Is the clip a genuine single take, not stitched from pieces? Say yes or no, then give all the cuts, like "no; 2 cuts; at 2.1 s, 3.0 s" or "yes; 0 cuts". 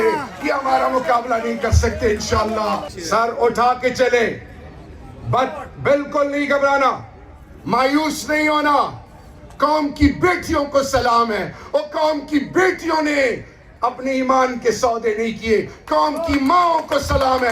no; 1 cut; at 2.9 s